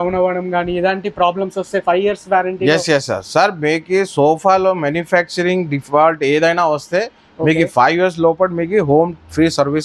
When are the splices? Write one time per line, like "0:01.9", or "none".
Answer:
none